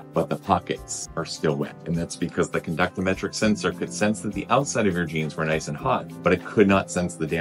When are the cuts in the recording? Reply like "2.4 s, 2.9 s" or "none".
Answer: none